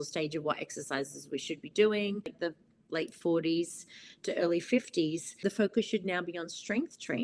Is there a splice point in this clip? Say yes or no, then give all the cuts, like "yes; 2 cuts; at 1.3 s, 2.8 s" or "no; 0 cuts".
yes; 2 cuts; at 2.5 s, 5.4 s